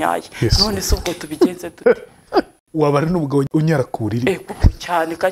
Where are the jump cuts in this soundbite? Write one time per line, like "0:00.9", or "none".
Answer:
0:02.6
0:03.5